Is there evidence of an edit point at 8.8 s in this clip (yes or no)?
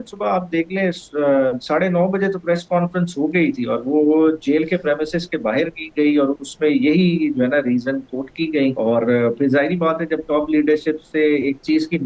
yes